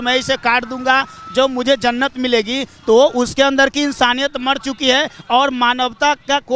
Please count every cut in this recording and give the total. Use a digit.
0